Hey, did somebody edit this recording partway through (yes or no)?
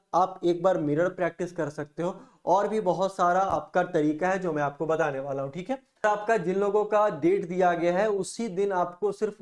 yes